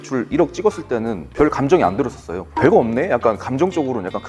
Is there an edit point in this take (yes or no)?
yes